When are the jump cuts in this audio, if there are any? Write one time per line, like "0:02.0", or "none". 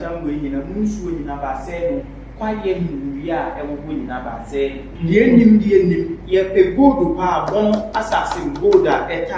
0:04.9